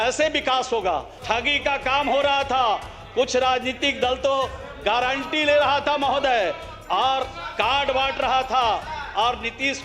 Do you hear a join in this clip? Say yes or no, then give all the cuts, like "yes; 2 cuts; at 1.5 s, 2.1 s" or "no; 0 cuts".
yes; 1 cut; at 1.1 s